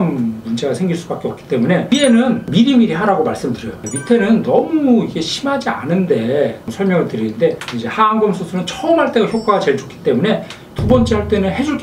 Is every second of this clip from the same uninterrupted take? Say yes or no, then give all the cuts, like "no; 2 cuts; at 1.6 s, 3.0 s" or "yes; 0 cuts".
no; 4 cuts; at 1.8 s, 3.8 s, 6.7 s, 10.6 s